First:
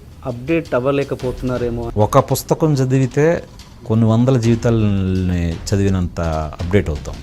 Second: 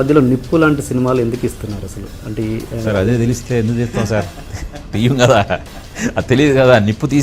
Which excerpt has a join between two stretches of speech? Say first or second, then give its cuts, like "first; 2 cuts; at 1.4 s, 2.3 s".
first; 1 cut; at 1.9 s